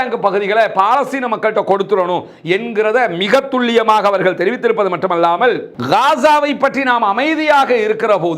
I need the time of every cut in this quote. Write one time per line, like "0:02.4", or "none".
0:05.7